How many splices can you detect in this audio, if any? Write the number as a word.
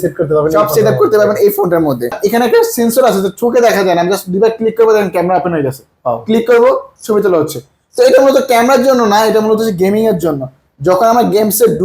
one